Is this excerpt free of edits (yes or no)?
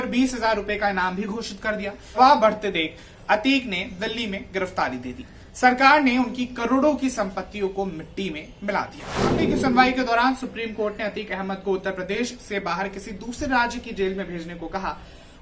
no